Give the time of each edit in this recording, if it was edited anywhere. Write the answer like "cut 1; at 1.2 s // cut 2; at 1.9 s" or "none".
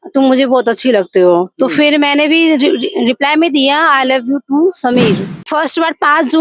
cut 1; at 5.4 s